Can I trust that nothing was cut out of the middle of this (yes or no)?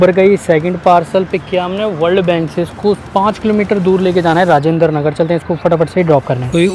yes